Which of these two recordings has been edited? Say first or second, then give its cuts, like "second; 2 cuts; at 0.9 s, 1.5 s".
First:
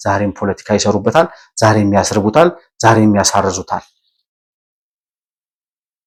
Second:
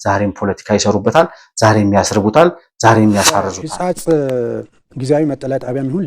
second; 1 cut; at 3.6 s